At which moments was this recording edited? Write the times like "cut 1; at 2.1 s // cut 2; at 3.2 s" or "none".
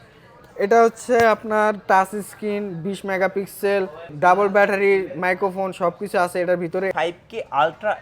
cut 1; at 6.9 s